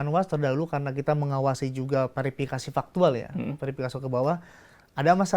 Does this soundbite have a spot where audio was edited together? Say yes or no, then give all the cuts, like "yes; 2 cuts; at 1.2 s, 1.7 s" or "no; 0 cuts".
no; 0 cuts